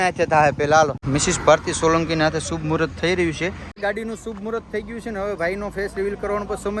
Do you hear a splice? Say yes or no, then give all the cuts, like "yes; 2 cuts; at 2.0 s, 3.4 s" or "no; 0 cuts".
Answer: yes; 2 cuts; at 1.0 s, 3.7 s